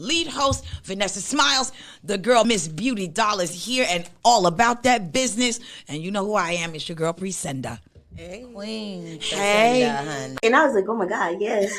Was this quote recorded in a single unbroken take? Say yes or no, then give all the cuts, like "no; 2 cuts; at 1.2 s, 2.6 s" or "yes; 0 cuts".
no; 1 cut; at 10.4 s